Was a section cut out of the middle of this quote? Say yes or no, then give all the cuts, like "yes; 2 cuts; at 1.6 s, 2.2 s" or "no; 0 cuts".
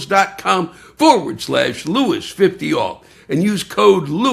no; 0 cuts